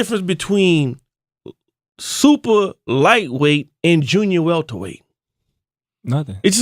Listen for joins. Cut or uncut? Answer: cut